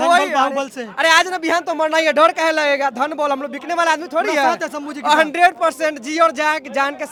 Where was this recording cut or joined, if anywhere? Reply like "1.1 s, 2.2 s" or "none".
none